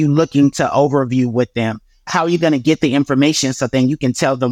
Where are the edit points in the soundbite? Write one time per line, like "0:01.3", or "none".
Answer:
0:02.1